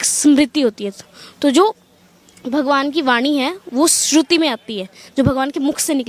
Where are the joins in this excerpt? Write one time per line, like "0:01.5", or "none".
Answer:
none